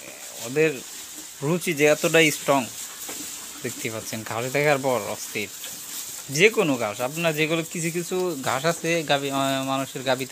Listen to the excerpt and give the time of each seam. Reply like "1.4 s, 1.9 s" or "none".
none

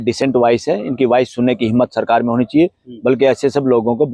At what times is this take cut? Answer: none

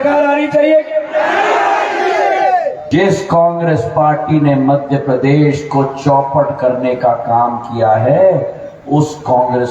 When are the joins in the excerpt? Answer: 2.8 s

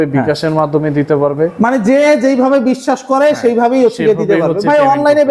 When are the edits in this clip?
none

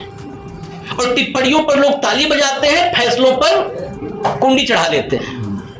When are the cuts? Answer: none

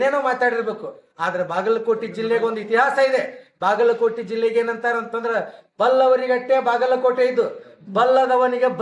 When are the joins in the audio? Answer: none

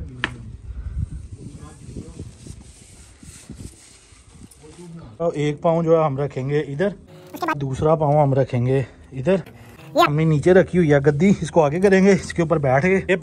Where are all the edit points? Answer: 5.2 s, 7.6 s, 10.1 s

